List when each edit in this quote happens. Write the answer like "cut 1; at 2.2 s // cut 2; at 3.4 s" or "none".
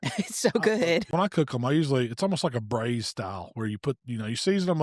cut 1; at 1.1 s